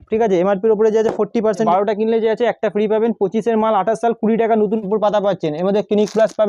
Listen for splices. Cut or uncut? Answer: cut